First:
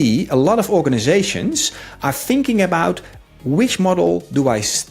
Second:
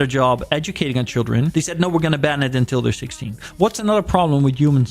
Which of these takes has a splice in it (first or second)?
second